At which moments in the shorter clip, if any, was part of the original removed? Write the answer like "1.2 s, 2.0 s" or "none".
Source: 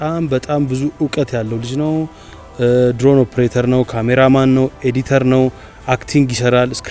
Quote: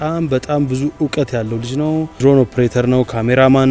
2.2 s